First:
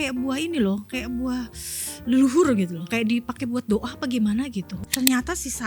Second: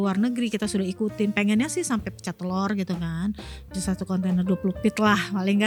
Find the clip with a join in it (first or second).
first